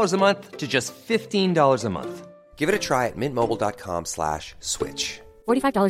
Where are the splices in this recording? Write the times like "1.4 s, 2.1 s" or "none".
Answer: none